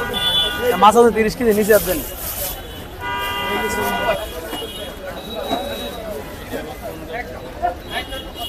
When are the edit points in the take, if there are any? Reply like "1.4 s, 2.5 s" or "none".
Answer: 4.1 s